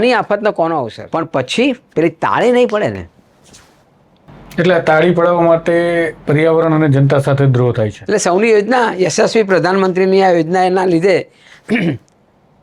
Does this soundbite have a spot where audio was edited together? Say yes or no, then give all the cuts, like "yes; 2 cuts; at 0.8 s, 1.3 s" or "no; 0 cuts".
yes; 2 cuts; at 1.0 s, 8.0 s